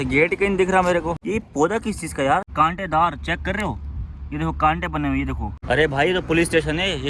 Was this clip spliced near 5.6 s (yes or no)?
yes